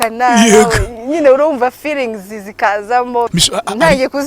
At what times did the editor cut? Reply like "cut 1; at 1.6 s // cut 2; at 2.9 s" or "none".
cut 1; at 3.3 s